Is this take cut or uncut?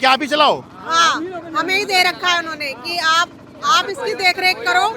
uncut